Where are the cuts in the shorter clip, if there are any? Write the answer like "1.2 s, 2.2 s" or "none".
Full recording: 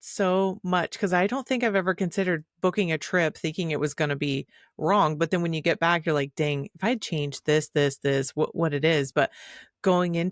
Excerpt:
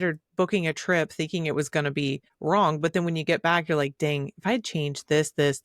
2.3 s